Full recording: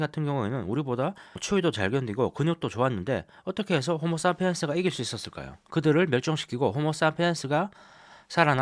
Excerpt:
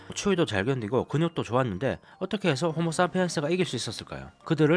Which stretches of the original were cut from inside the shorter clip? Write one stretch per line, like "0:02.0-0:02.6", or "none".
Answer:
none